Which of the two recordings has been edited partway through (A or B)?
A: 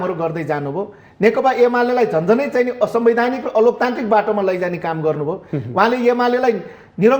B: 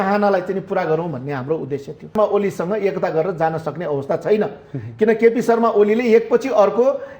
B